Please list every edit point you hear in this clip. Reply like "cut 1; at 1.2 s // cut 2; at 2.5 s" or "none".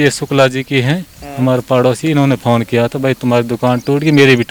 none